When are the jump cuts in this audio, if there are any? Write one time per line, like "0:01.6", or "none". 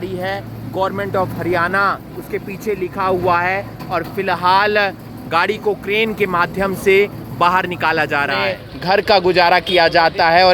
0:08.7